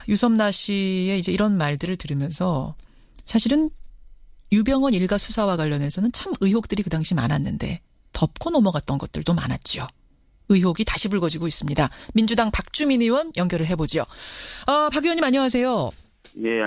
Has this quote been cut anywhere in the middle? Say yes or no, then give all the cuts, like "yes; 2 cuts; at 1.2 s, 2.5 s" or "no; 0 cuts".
no; 0 cuts